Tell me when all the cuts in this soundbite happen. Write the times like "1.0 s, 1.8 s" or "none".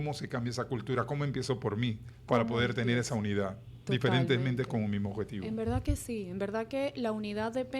none

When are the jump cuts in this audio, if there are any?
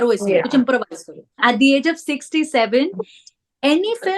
1.4 s

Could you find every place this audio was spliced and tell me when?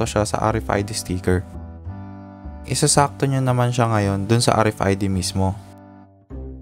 5.6 s

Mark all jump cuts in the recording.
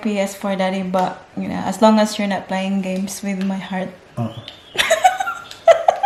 none

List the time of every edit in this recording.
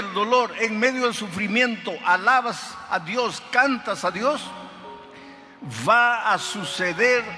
none

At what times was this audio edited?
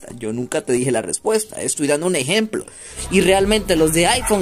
3.0 s

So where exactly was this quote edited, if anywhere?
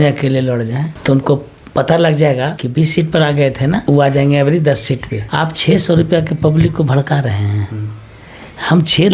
0.9 s, 2.6 s, 3.8 s, 5.2 s

